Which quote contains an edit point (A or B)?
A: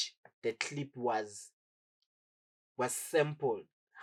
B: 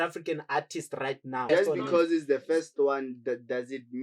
B